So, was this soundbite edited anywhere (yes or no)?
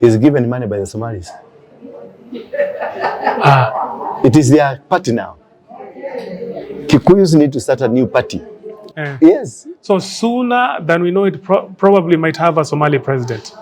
yes